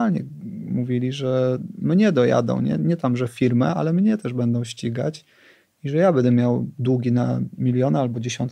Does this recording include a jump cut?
no; 0 cuts

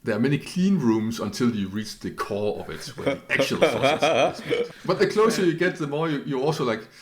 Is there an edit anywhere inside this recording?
yes; 1 cut; at 4.7 s

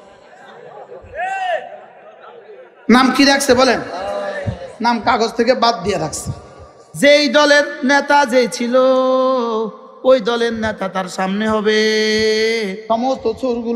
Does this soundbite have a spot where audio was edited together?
yes; 1 cut; at 6.9 s

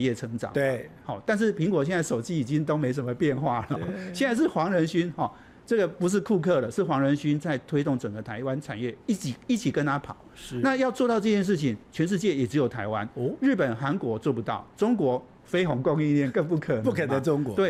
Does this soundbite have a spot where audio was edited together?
no; 0 cuts

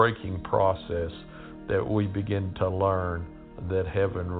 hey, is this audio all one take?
no; 1 cut; at 2.5 s

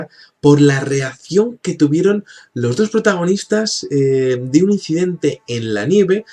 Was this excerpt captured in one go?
yes; 0 cuts

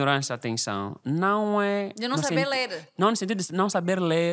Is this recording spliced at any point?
no; 0 cuts

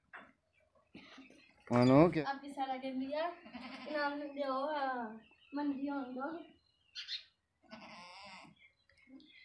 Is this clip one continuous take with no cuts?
no; 1 cut; at 2.1 s

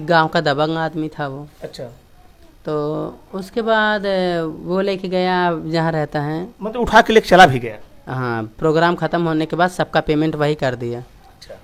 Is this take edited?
no; 0 cuts

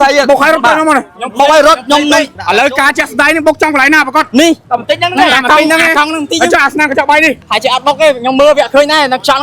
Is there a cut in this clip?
yes; 3 cuts; at 2.4 s, 4.6 s, 7.5 s

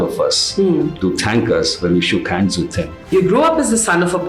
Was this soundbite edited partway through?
yes; 1 cut; at 3.1 s

